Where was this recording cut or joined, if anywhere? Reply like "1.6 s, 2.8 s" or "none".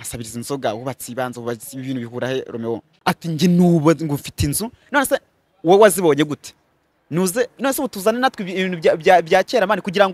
2.9 s